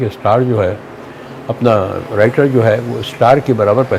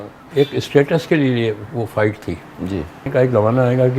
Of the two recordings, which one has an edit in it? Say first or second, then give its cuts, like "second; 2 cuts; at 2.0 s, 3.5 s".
second; 1 cut; at 3.1 s